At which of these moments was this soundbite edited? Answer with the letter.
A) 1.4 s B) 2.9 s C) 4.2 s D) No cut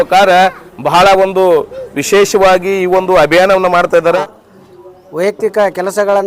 C